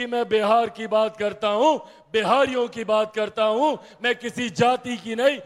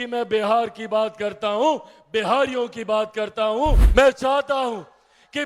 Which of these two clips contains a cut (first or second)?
second